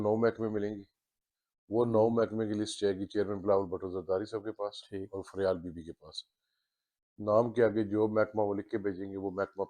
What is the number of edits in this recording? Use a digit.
0